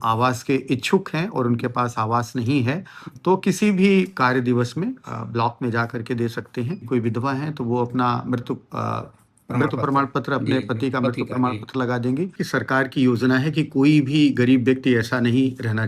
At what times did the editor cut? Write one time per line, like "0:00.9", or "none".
0:06.8
0:12.4